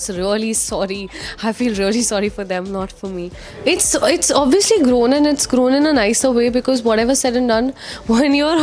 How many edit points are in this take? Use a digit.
1